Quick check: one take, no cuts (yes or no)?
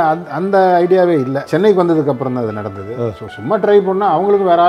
no